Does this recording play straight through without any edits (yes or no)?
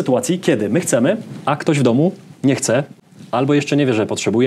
yes